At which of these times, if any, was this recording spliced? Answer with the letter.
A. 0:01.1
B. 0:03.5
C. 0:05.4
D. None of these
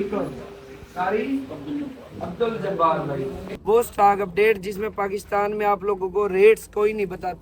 B